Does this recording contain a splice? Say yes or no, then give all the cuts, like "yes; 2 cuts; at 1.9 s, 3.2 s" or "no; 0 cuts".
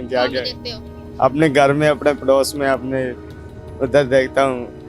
no; 0 cuts